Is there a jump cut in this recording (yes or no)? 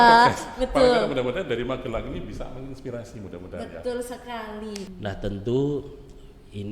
yes